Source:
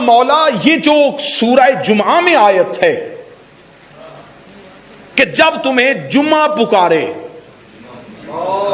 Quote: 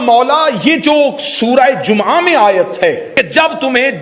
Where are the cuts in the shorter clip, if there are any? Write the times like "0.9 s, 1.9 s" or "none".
3.1 s